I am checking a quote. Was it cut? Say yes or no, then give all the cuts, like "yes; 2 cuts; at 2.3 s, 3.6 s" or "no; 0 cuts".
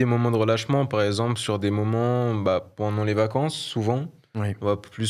no; 0 cuts